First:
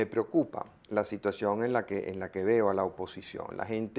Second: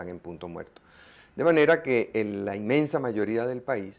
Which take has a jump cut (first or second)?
second